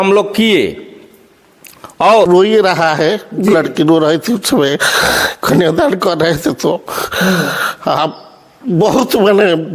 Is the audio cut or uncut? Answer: cut